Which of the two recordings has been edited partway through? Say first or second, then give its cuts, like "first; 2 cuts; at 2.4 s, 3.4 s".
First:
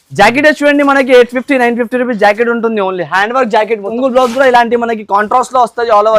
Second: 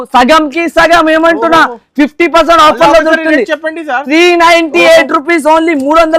first; 1 cut; at 3.9 s